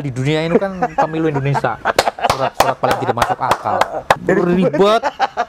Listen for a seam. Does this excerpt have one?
yes; 1 cut; at 4.2 s

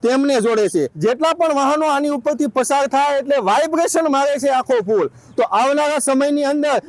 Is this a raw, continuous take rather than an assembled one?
no; 1 cut; at 0.9 s

